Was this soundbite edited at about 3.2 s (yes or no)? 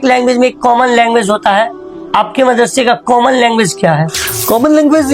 no